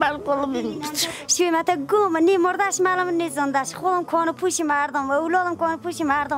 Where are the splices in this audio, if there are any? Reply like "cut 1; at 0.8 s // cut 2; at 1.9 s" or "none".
cut 1; at 1.0 s